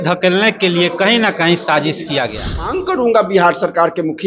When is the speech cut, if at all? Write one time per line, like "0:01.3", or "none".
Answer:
0:02.8